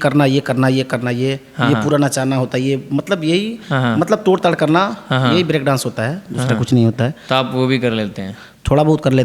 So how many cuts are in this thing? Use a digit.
0